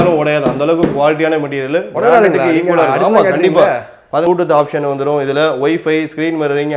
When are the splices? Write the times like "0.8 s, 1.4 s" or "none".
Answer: 4.2 s